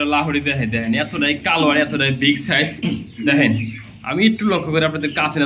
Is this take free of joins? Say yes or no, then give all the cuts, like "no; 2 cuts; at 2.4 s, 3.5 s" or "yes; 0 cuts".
yes; 0 cuts